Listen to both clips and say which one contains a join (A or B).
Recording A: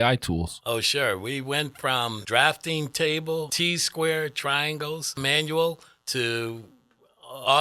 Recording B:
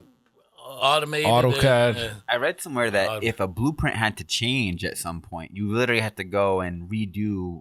A